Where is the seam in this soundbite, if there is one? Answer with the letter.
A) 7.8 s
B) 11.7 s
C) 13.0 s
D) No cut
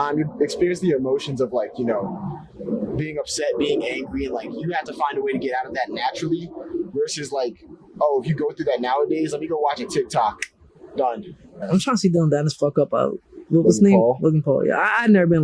B